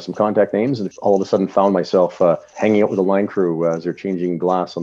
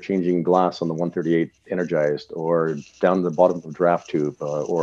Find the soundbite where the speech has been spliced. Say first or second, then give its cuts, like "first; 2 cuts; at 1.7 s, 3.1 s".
first; 2 cuts; at 0.8 s, 2.5 s